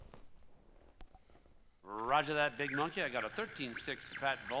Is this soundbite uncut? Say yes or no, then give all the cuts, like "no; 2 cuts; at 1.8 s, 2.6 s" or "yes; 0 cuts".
no; 1 cut; at 2.9 s